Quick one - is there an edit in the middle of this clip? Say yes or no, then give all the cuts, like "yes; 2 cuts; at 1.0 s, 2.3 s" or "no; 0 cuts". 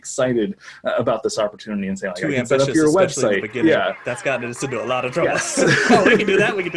no; 0 cuts